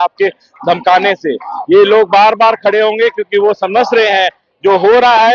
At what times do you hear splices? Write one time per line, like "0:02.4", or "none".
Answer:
none